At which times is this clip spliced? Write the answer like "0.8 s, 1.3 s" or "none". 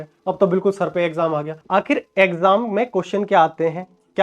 1.5 s